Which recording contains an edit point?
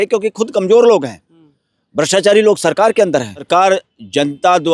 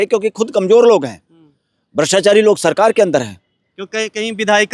first; 1 cut; at 3.5 s

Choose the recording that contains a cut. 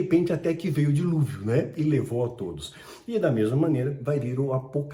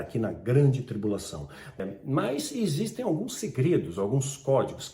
second; 1 cut; at 1.8 s

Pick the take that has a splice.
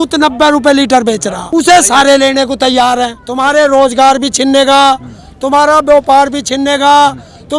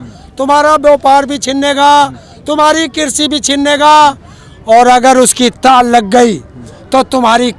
first; 2 cuts; at 1.4 s, 3.2 s

